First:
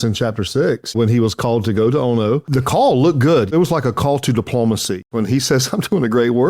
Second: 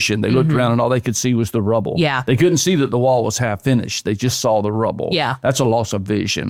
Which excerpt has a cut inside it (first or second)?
first